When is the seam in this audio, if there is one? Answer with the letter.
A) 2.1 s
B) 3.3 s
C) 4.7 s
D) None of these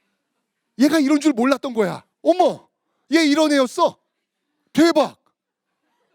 A